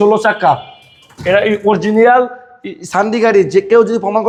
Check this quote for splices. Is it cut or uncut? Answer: uncut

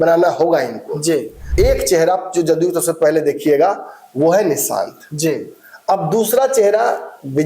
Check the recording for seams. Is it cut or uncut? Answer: cut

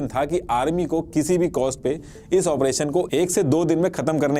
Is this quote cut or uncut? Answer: uncut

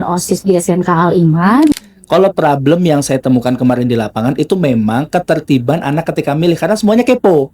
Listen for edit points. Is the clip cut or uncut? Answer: cut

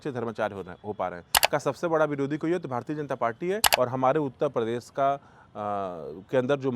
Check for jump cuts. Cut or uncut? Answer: cut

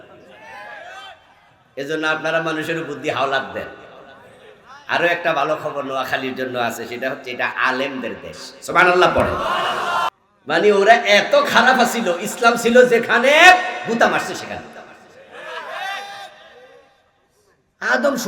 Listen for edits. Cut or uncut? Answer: cut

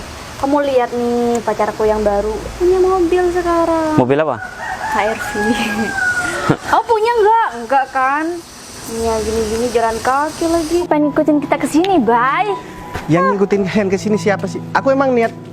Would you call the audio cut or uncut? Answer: cut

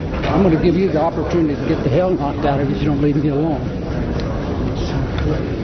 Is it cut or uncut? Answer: uncut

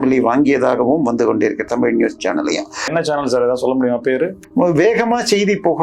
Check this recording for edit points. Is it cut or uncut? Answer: cut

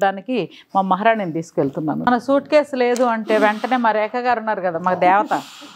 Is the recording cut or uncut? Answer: cut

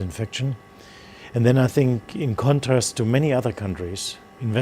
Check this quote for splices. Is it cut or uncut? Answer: cut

